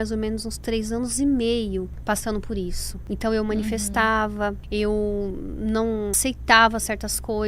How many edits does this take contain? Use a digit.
4